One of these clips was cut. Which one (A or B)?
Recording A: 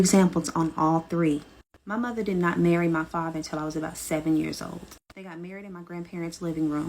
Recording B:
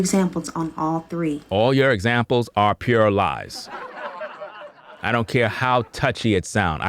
A